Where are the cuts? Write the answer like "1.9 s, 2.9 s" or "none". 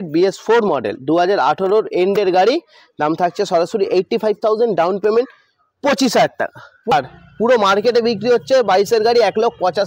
6.9 s